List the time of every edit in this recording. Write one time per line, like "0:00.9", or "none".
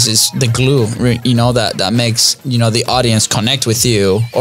none